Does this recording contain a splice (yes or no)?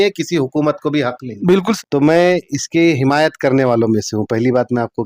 yes